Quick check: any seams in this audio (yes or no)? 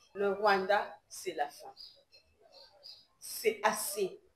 no